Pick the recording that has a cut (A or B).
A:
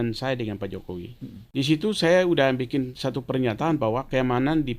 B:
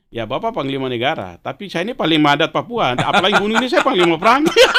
A